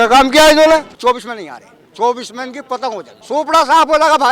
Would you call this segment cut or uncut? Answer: cut